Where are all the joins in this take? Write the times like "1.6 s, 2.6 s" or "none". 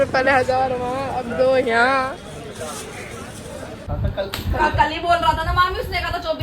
3.9 s